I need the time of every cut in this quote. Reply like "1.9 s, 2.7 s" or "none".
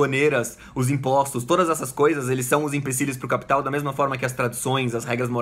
none